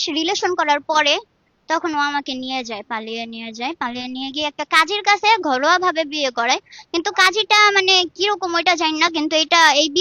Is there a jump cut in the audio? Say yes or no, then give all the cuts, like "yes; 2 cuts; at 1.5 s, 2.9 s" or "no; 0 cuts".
no; 0 cuts